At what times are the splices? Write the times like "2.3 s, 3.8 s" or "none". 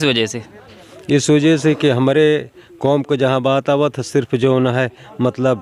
none